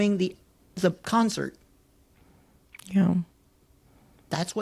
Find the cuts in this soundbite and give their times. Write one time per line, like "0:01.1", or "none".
none